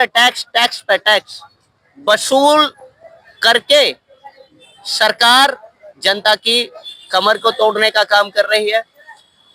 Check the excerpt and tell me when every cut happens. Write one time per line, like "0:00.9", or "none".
none